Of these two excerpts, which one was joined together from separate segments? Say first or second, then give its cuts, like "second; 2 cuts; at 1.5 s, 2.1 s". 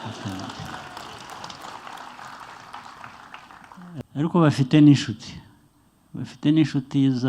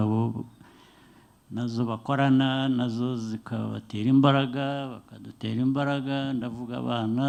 first; 1 cut; at 4.0 s